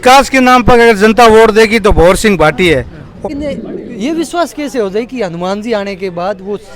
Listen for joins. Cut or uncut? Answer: cut